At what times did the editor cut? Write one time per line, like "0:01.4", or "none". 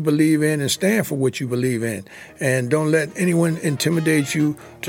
none